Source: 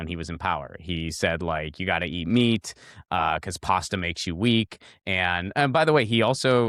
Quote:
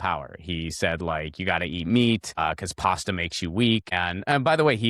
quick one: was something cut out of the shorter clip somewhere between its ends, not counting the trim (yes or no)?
yes